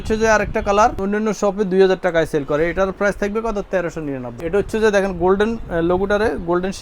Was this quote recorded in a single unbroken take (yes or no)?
no